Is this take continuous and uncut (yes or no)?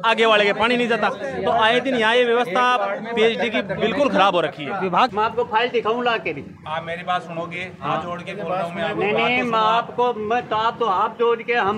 no